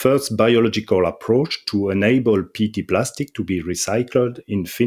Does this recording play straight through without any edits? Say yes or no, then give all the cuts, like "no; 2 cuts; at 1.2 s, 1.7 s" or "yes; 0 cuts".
yes; 0 cuts